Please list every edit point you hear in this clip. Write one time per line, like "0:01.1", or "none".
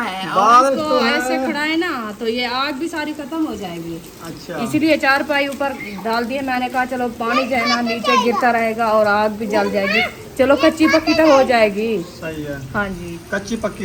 none